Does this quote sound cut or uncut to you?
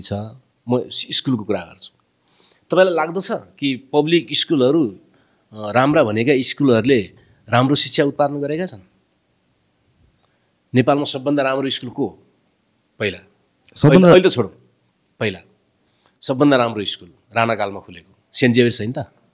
uncut